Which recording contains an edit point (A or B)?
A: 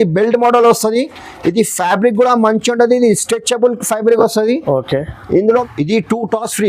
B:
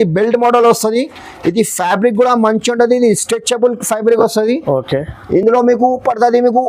A